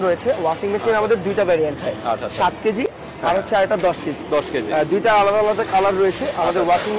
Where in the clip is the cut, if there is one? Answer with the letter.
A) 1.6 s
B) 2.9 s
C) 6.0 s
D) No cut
D